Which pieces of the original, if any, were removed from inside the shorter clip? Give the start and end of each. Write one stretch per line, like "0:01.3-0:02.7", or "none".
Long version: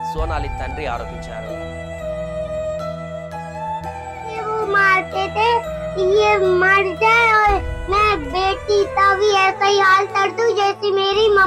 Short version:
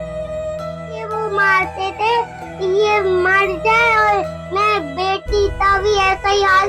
0:03.2-0:04.4

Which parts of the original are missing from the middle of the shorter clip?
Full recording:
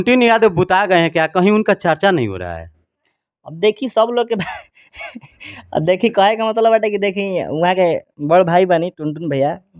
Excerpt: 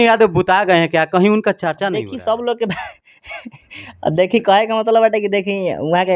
0:02.2-0:03.7

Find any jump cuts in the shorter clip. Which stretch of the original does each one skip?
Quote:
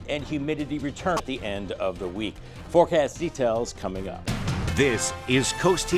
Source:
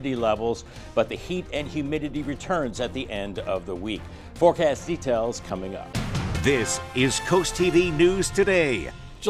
0:02.6-0:02.9

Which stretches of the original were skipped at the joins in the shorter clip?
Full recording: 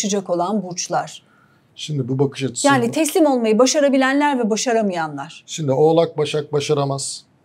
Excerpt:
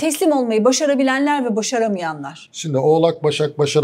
none

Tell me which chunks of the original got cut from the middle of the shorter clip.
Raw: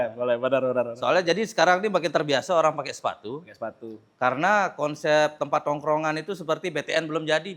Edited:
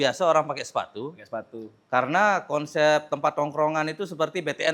none

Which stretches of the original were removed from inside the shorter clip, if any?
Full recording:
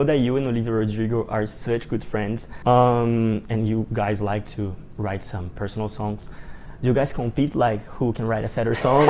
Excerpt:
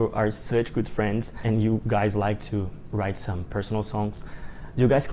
0:02.5-0:03.4

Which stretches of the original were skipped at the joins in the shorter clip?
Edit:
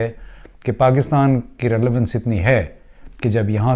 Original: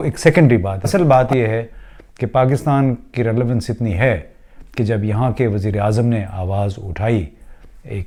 none

